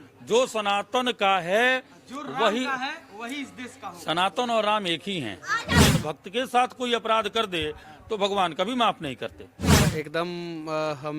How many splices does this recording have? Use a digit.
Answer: 2